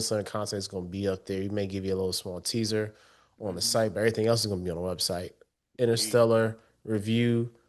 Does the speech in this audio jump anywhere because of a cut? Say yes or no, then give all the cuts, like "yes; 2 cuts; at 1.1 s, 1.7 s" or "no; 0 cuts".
no; 0 cuts